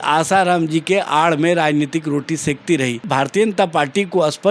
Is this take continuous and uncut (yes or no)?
no